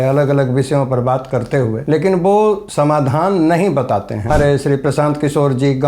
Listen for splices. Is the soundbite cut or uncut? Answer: cut